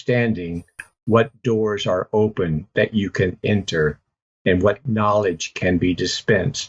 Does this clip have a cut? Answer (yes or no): no